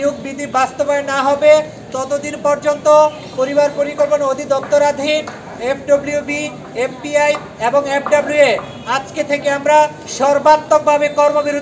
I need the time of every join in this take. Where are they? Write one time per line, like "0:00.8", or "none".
none